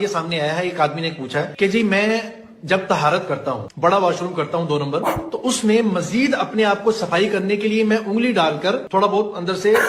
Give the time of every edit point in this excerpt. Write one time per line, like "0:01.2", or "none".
none